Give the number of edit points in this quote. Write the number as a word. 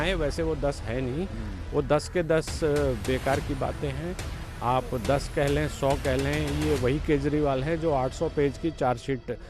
zero